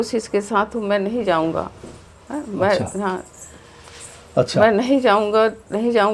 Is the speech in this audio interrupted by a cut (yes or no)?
no